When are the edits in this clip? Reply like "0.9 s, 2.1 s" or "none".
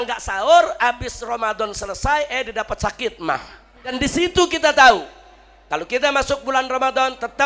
4.0 s